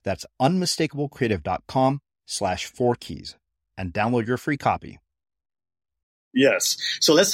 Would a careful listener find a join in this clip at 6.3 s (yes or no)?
yes